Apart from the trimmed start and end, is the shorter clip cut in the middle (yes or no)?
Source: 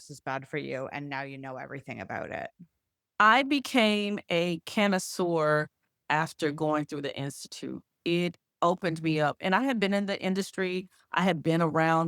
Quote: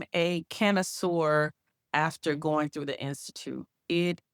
no